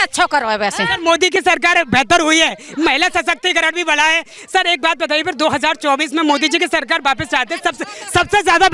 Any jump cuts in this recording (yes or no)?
no